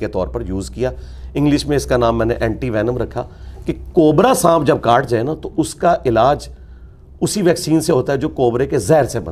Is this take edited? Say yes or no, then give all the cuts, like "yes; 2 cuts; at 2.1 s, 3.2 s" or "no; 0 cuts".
no; 0 cuts